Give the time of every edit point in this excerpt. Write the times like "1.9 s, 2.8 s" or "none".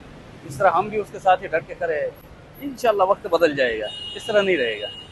none